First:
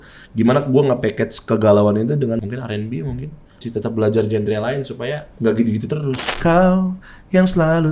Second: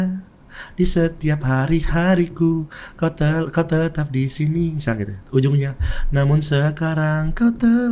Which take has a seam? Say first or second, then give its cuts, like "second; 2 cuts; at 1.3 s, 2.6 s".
first; 4 cuts; at 2.4 s, 3.6 s, 5.2 s, 6.2 s